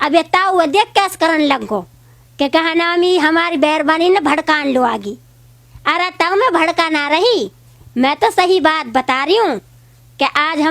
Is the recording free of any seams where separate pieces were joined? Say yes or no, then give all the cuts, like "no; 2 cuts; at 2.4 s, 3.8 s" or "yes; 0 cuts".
yes; 0 cuts